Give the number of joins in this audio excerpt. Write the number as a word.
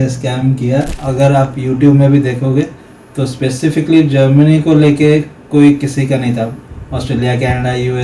one